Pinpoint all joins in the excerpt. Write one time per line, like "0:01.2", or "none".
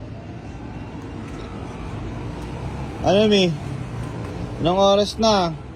none